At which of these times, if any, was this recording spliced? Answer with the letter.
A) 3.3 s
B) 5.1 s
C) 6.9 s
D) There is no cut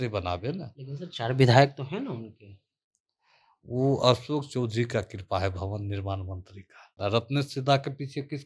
C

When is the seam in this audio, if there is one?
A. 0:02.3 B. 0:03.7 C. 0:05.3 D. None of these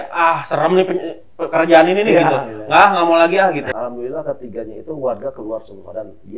B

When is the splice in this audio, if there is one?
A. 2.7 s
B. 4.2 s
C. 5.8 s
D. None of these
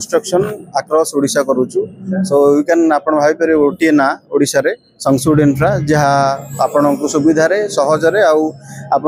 D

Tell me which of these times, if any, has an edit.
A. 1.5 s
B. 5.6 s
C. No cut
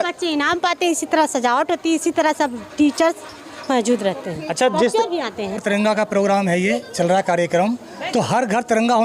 B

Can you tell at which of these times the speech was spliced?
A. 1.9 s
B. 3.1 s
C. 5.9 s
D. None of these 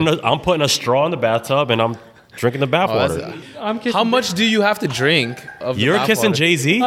B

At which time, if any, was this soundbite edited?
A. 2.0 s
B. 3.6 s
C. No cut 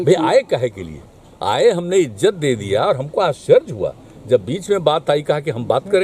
C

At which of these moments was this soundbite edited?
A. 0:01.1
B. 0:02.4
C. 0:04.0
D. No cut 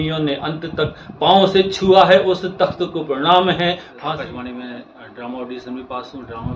C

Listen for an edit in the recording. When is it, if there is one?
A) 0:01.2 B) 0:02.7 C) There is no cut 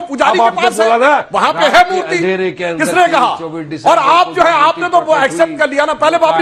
C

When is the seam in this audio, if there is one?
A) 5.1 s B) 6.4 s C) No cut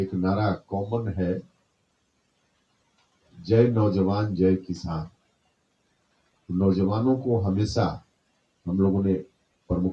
C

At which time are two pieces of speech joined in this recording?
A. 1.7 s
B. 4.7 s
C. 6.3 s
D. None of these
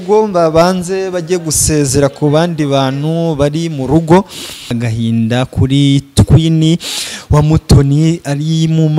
B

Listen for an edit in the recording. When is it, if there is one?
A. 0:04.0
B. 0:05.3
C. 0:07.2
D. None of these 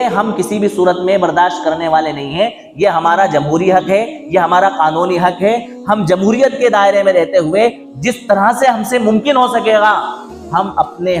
D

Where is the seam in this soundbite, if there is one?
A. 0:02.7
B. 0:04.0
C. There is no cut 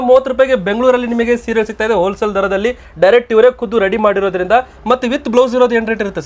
C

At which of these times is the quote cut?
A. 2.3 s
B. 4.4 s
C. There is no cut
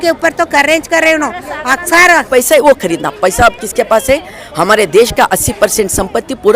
A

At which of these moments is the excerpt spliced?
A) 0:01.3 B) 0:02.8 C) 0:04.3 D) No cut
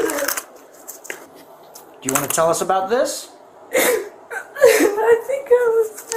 A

